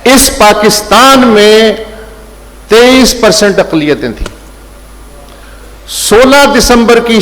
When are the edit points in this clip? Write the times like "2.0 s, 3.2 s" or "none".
none